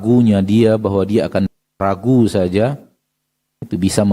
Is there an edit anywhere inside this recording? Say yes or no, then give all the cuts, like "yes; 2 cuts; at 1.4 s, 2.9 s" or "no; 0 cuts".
yes; 1 cut; at 1.5 s